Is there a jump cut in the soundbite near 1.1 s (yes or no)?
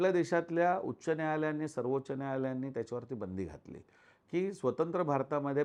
no